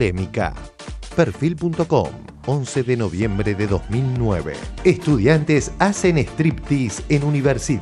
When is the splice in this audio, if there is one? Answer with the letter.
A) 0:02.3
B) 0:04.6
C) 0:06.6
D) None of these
B